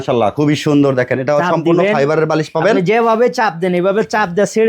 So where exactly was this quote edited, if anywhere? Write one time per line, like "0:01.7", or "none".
none